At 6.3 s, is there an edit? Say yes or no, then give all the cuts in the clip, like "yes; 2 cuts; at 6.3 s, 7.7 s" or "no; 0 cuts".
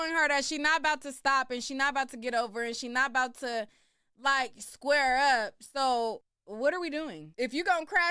yes; 2 cuts; at 6.3 s, 7.2 s